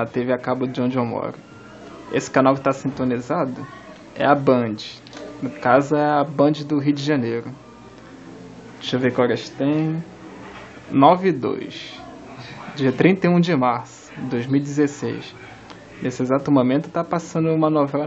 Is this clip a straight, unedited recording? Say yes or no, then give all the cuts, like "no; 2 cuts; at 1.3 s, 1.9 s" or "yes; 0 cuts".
no; 1 cut; at 12.6 s